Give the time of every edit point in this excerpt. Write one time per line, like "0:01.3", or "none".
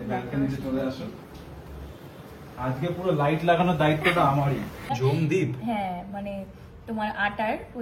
0:04.7